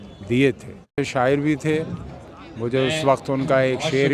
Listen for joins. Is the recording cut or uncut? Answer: cut